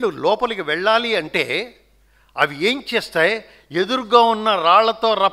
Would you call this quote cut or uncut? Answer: uncut